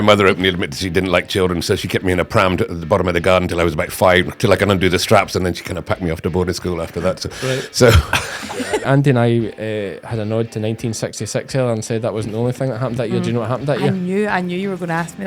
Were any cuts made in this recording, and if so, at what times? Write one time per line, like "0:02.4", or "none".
0:08.4